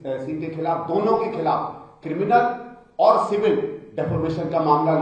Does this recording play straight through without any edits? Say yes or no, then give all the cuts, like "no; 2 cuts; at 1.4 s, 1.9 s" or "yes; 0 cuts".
yes; 0 cuts